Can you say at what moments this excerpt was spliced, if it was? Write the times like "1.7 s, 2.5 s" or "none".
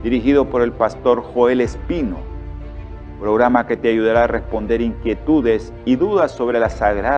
none